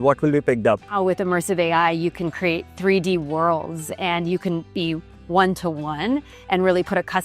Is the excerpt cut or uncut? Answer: cut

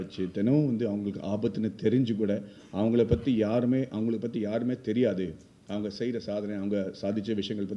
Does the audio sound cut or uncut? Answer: uncut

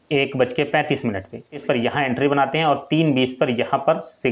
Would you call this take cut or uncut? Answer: cut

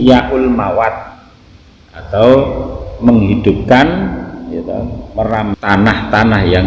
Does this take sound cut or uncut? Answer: cut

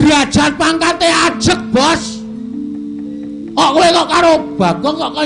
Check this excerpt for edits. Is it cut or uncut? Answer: uncut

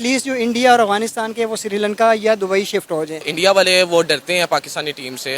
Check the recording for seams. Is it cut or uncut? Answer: cut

